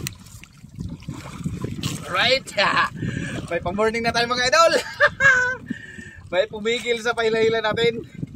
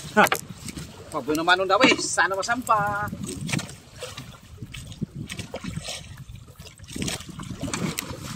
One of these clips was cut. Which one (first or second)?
second